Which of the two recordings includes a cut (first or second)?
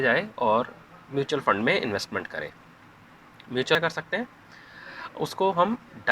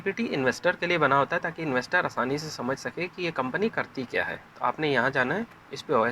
first